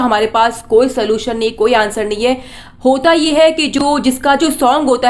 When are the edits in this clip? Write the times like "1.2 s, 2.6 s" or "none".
none